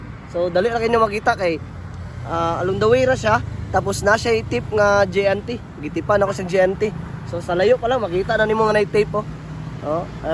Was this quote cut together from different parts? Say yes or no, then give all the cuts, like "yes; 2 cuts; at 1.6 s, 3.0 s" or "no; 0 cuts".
no; 0 cuts